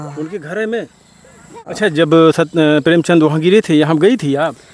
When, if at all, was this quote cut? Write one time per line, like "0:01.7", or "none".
0:01.7